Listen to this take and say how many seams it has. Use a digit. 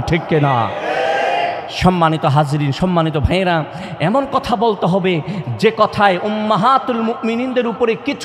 0